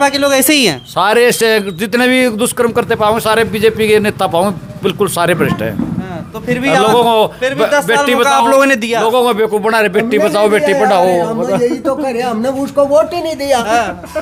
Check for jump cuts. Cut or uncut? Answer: uncut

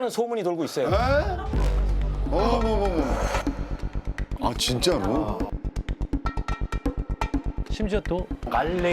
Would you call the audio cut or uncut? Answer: cut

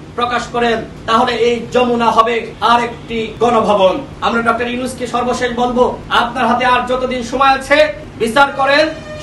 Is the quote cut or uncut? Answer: cut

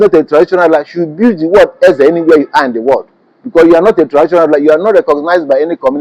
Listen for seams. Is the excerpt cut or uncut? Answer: uncut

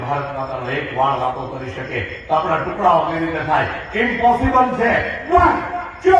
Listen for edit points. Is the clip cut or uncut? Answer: uncut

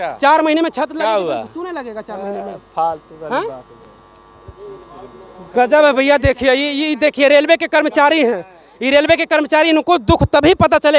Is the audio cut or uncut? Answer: uncut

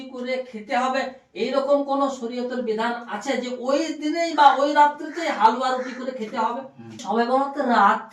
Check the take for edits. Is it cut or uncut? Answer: cut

